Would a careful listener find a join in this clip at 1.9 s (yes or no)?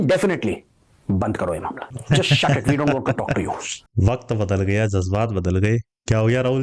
yes